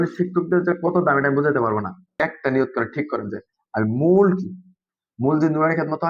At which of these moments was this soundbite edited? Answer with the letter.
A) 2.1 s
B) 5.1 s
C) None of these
A